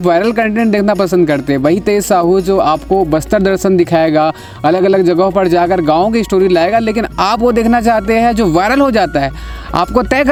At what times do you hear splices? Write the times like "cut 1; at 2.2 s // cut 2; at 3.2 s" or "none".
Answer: none